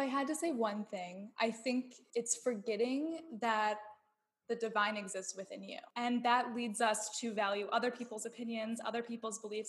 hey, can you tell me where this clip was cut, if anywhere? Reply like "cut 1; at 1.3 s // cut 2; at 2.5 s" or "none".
cut 1; at 2.0 s // cut 2; at 5.9 s